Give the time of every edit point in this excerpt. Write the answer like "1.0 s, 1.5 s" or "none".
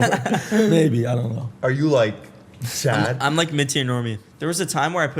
4.2 s